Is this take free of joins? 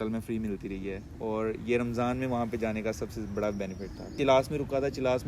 no; 1 cut; at 4.1 s

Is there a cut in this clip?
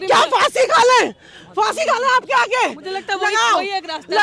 no; 0 cuts

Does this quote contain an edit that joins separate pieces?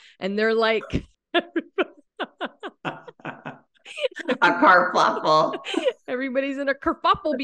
yes; 2 cuts; at 1.2 s, 2.0 s

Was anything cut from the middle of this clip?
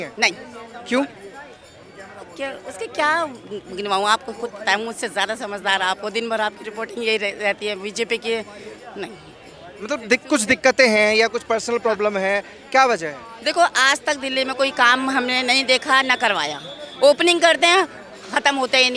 no; 0 cuts

